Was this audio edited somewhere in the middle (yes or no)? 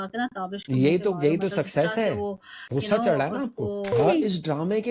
yes